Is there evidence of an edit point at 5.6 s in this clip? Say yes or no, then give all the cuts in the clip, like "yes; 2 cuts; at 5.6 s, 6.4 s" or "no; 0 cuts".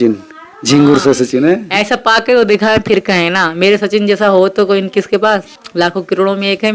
yes; 1 cut; at 5.6 s